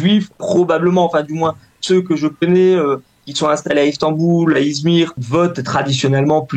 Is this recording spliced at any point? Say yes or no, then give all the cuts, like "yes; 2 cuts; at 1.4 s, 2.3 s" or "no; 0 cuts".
yes; 1 cut; at 5.2 s